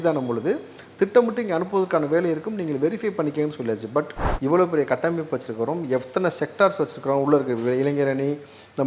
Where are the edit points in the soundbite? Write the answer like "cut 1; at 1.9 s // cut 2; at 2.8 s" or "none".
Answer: cut 1; at 4.2 s